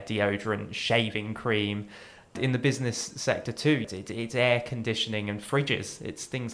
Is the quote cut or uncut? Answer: cut